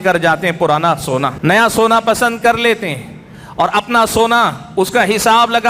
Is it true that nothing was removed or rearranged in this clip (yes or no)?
no